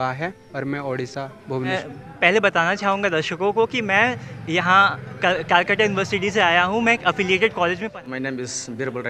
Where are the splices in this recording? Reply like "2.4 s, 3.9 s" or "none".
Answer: 1.7 s, 7.8 s